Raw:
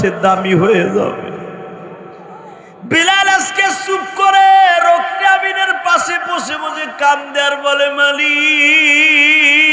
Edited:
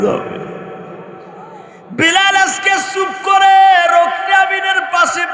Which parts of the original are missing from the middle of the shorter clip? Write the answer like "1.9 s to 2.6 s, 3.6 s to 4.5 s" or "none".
none